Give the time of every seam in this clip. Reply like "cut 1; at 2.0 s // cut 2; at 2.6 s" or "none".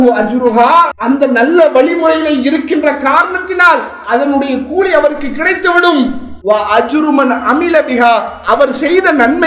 cut 1; at 1.0 s // cut 2; at 6.3 s // cut 3; at 8.4 s

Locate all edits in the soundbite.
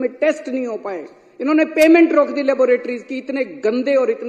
none

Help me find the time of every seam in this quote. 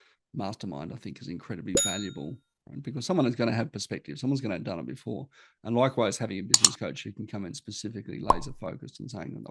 none

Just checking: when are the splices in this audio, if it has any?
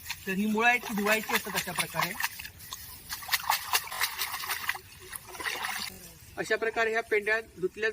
cut 1; at 3.9 s // cut 2; at 5.9 s

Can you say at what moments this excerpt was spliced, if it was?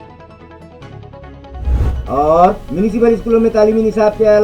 none

